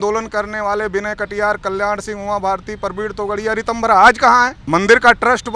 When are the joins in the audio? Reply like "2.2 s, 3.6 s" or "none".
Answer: 4.6 s